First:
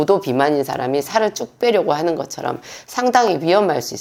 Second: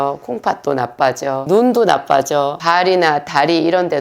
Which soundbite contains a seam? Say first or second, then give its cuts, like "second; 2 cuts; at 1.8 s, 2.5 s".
second; 2 cuts; at 1.5 s, 2.6 s